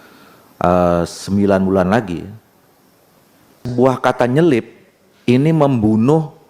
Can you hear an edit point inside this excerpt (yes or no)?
yes